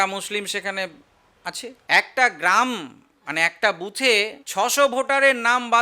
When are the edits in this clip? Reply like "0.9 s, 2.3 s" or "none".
1.8 s